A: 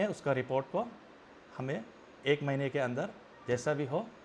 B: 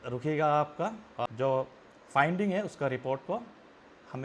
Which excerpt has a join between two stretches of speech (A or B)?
B